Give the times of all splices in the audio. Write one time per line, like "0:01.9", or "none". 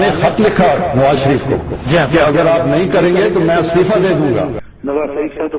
0:04.7